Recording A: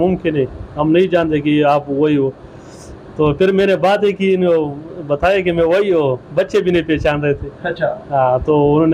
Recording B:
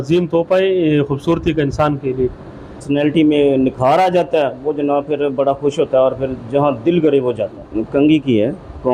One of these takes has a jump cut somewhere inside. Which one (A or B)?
B